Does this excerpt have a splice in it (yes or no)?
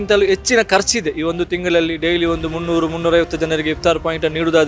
no